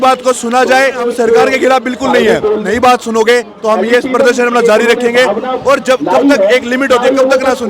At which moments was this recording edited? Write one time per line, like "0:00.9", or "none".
0:01.1
0:02.6